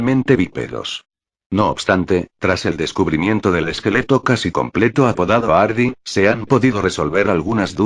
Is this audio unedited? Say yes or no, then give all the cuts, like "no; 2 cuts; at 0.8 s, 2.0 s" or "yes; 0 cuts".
no; 1 cut; at 2.6 s